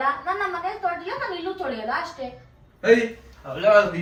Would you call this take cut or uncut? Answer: uncut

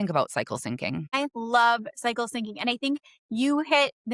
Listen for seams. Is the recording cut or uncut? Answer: cut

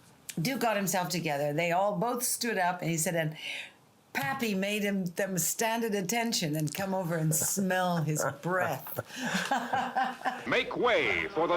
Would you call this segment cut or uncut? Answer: cut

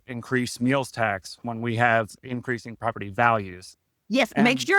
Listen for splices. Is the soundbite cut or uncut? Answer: uncut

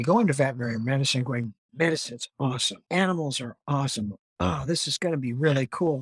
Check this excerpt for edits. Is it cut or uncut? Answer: cut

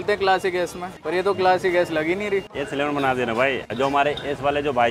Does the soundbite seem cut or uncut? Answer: cut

